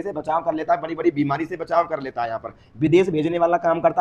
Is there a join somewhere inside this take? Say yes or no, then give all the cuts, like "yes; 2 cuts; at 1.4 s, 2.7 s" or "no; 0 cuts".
no; 0 cuts